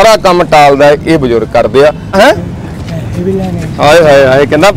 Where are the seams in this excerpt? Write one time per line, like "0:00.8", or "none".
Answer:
0:02.1